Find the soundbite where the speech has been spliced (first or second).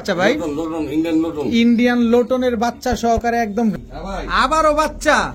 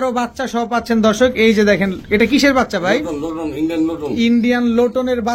first